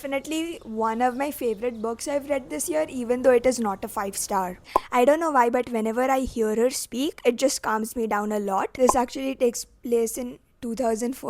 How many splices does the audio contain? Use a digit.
2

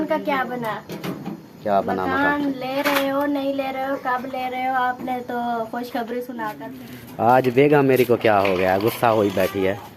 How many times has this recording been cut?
1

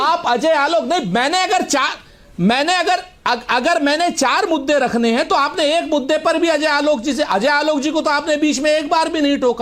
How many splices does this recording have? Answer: 0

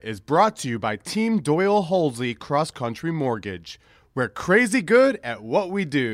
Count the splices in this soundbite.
0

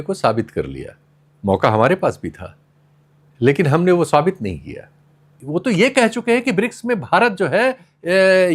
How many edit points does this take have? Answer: 1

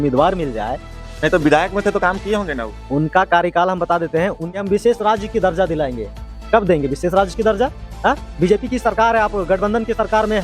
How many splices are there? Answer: 1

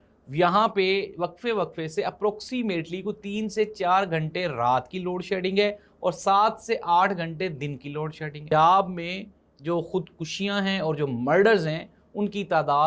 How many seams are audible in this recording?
1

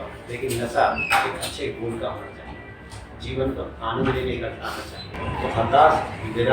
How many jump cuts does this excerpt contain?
1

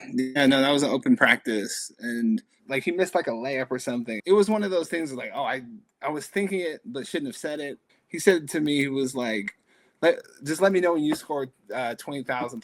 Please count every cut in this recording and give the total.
3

